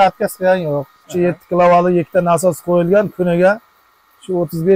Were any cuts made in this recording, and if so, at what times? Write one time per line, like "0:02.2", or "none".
0:01.0